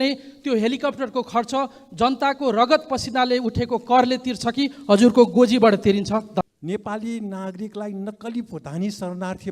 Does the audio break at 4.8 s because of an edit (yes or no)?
no